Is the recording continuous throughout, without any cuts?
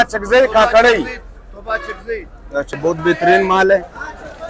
no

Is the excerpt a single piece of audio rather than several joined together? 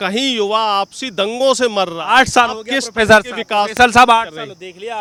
yes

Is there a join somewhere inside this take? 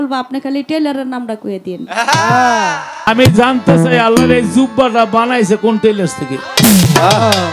yes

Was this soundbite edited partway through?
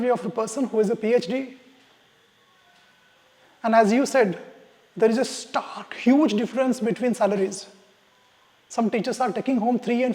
no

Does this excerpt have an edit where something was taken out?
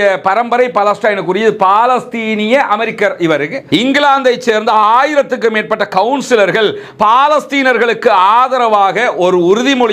yes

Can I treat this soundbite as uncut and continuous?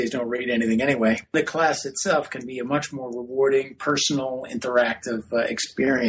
no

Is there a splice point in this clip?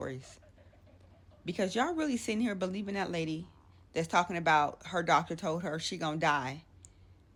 no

